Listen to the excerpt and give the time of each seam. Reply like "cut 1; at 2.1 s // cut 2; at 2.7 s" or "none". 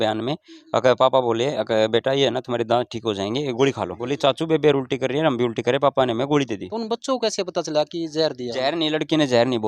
cut 1; at 4.0 s // cut 2; at 6.7 s

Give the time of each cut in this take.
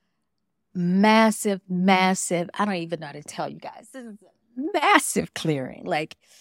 none

